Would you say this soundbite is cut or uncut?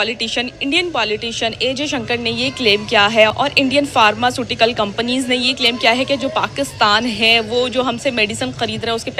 uncut